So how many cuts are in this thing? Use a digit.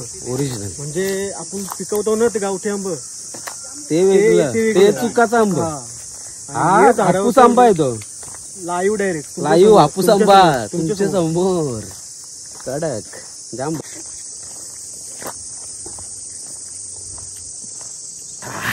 1